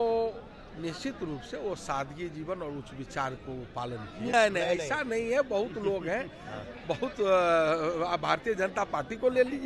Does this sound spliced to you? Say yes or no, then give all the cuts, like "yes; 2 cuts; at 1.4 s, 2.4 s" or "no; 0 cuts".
yes; 1 cut; at 4.3 s